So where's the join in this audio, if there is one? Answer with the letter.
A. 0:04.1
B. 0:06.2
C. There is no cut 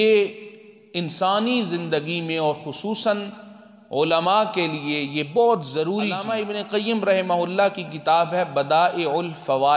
B